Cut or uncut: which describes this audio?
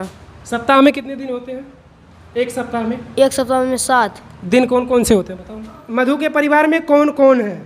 cut